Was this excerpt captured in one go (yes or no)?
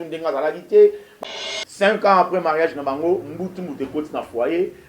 no